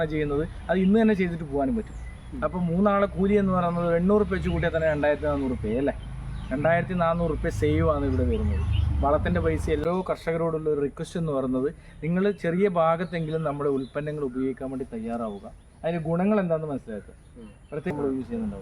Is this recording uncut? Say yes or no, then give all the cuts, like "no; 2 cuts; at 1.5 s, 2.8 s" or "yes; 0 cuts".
no; 2 cuts; at 9.8 s, 17.9 s